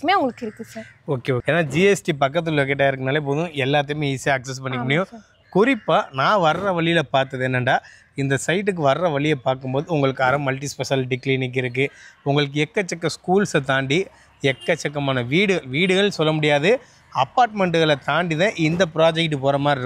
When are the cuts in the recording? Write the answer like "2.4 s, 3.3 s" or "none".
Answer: none